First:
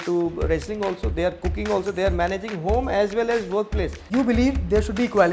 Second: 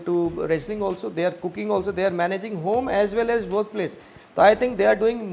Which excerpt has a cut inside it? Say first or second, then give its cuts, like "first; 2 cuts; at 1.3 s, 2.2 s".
first; 1 cut; at 4.0 s